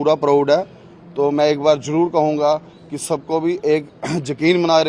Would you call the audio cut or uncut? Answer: uncut